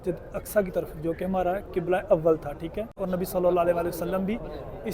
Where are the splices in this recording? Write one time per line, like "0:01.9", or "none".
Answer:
0:02.6